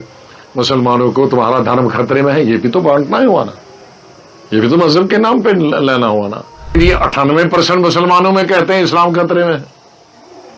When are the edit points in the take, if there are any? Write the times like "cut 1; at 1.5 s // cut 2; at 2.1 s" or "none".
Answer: cut 1; at 6.8 s